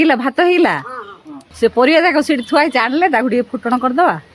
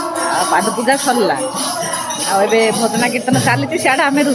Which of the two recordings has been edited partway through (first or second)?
first